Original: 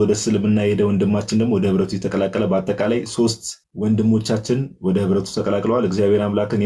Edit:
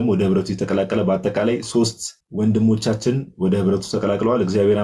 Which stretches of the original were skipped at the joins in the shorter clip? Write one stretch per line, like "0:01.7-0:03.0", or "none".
none